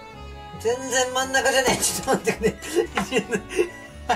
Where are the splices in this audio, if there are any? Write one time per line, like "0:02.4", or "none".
none